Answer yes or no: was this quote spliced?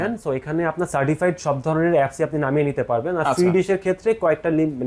no